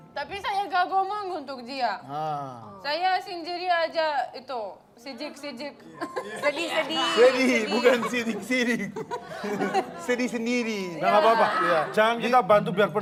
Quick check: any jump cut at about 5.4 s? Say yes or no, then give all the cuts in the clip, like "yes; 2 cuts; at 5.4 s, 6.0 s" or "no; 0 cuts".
no; 0 cuts